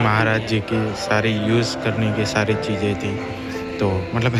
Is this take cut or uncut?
uncut